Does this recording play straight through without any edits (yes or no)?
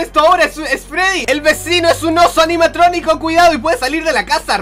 yes